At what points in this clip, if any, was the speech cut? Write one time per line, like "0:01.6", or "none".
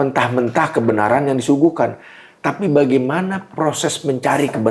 none